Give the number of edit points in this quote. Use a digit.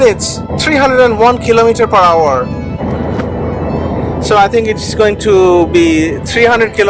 0